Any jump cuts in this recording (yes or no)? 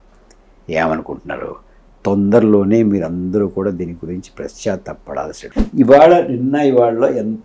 yes